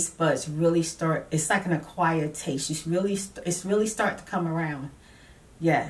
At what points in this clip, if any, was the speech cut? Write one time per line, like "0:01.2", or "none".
none